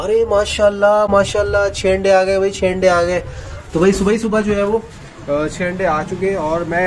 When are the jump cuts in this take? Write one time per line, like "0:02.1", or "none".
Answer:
none

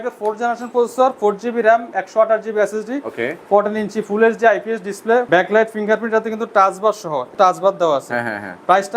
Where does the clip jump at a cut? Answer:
0:05.3
0:07.3

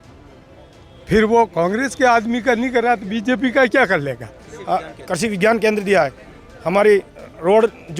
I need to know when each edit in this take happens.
0:04.5

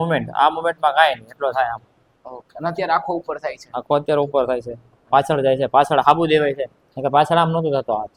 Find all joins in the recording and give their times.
none

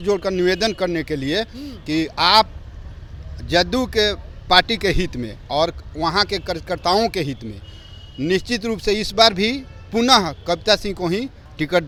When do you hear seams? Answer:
none

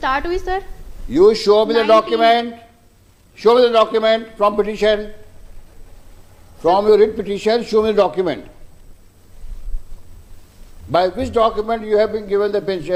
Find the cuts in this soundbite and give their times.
none

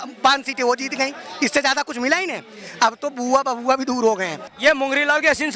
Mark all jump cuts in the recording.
0:04.5

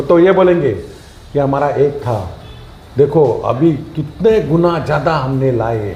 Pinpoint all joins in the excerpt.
none

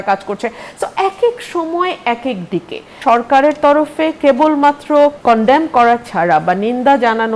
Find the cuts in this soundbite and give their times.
0:02.9
0:05.2

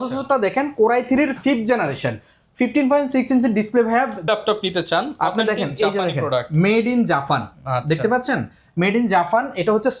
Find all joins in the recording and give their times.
0:04.2

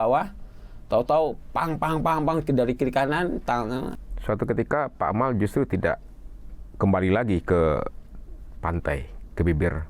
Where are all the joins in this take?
0:03.9

